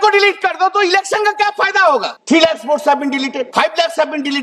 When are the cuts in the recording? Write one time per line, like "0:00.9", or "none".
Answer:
0:02.1
0:03.5